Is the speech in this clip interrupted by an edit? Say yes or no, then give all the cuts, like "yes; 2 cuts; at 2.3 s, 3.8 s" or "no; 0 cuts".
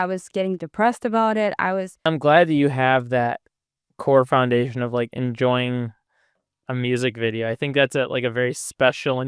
yes; 1 cut; at 2.0 s